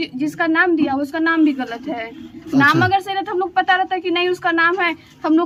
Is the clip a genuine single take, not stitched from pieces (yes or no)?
yes